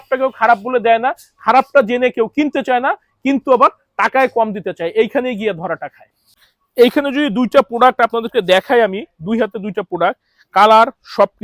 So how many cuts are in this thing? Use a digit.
0